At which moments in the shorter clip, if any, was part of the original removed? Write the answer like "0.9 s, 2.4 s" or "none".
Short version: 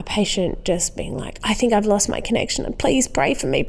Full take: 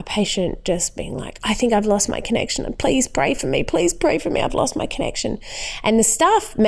none